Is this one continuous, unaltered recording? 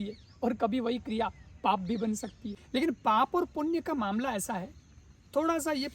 no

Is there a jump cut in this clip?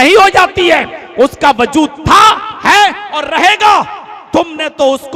no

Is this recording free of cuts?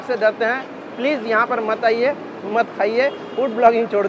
yes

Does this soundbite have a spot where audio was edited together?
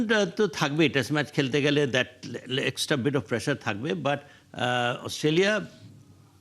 no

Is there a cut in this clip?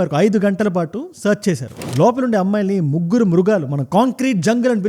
yes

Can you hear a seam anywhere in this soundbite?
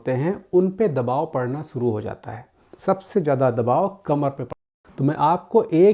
yes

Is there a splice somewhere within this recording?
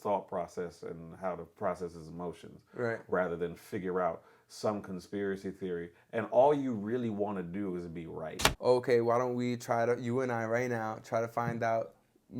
yes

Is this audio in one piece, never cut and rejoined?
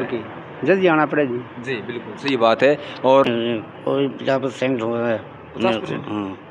no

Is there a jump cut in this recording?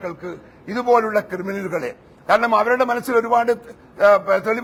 no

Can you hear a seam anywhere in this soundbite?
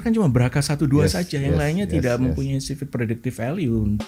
no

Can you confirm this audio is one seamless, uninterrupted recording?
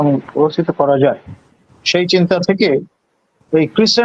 yes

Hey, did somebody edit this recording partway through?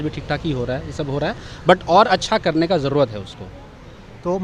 no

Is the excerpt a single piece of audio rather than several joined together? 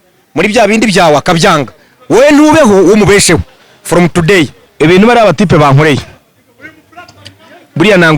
no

